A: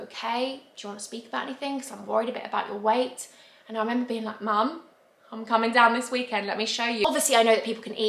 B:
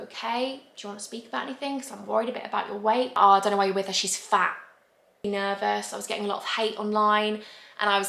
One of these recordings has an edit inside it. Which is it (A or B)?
B